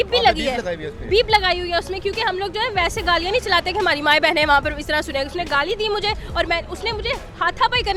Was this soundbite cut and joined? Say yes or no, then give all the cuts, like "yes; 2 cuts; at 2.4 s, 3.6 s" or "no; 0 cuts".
no; 0 cuts